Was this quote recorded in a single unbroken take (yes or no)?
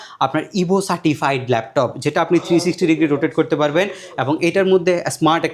yes